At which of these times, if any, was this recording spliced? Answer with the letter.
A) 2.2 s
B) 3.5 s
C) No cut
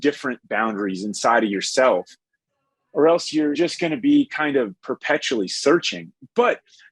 B